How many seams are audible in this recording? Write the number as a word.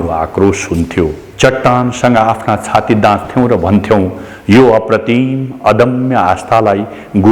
one